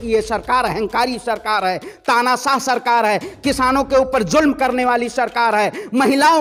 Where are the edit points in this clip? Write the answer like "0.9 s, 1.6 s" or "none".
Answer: none